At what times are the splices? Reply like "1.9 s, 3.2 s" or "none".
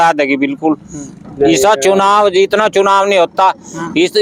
none